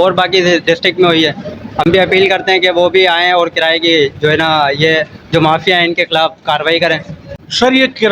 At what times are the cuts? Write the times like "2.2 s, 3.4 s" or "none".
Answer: 7.2 s